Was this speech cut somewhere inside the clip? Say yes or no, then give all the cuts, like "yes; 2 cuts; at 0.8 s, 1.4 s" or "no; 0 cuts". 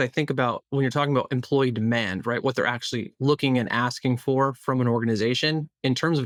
no; 0 cuts